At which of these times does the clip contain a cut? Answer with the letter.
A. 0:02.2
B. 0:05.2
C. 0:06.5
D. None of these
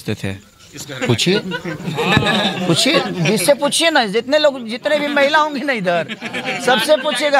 D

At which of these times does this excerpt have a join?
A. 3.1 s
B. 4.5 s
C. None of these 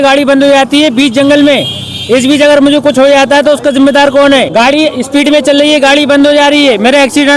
B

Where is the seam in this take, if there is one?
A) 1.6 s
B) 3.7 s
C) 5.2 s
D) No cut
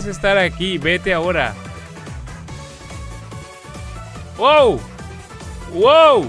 D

